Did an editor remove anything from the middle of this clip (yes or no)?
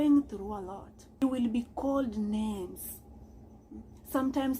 yes